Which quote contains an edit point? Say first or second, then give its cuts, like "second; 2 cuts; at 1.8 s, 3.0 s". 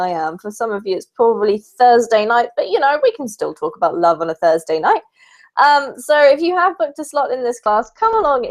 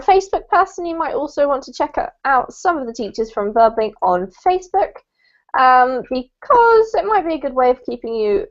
second; 1 cut; at 3.2 s